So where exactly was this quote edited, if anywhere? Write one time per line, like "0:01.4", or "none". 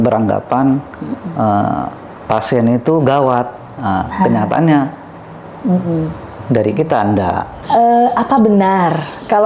0:07.5